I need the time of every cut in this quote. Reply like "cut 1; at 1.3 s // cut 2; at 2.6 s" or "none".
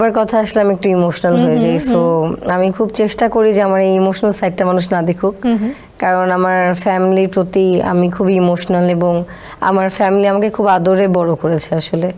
none